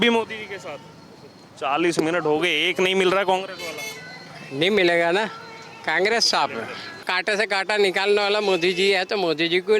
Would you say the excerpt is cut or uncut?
cut